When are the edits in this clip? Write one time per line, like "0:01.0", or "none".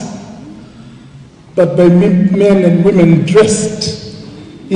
none